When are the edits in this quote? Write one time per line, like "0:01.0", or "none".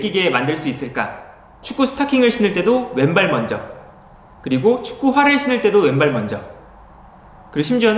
0:01.6